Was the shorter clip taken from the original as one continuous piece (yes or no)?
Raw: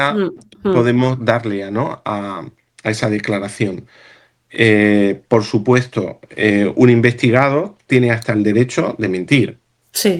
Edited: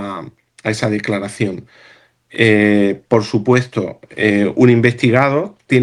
yes